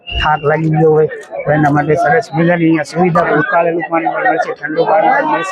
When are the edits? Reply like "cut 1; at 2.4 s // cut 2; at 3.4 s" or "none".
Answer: cut 1; at 3.2 s